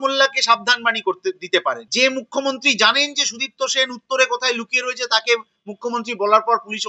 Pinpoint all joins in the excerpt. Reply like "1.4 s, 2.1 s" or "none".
1.8 s